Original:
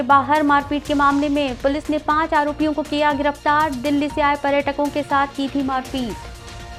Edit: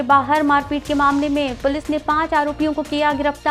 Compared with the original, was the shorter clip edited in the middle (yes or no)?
no